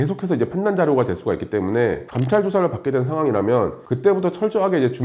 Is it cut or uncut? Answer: uncut